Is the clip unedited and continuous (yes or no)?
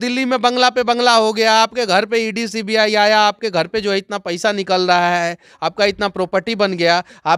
yes